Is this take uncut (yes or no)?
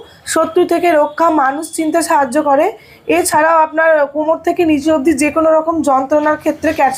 yes